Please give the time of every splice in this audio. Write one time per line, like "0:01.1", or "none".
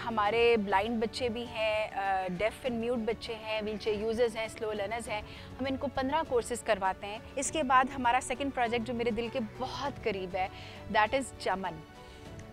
0:07.2